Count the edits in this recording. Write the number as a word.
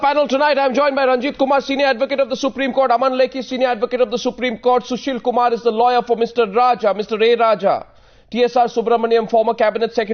zero